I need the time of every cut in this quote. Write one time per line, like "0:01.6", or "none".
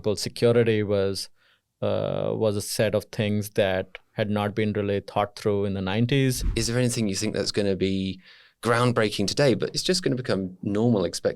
0:06.4